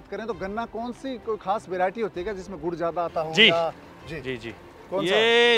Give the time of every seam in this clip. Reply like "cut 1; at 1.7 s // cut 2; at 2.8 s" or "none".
none

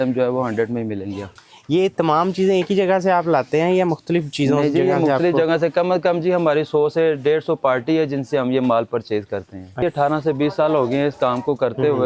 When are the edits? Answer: cut 1; at 1.4 s // cut 2; at 9.8 s

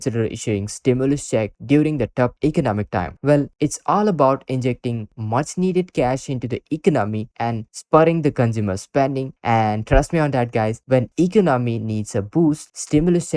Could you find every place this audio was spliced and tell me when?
none

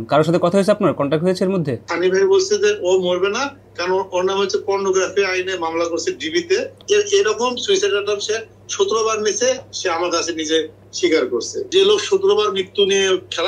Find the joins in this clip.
cut 1; at 1.9 s // cut 2; at 6.7 s // cut 3; at 11.6 s

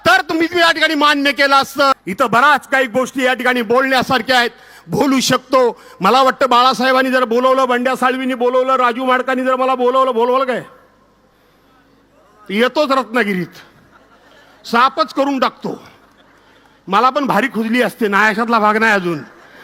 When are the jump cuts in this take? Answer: cut 1; at 1.9 s

